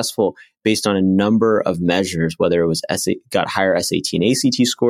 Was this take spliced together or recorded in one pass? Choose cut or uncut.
uncut